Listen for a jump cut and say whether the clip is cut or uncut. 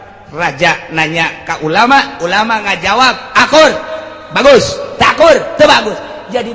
uncut